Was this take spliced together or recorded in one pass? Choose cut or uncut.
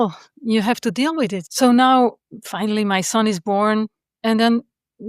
cut